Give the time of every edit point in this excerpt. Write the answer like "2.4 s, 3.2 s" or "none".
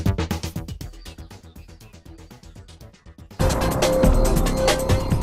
2.9 s